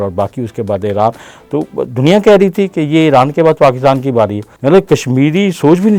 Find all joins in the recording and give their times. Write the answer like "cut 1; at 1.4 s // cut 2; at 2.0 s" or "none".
cut 1; at 4.5 s